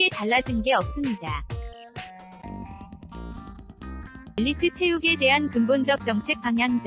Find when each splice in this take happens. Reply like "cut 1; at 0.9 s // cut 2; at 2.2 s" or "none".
cut 1; at 1.4 s // cut 2; at 3.7 s